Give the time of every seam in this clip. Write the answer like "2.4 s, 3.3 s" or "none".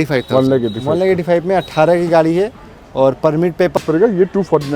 3.8 s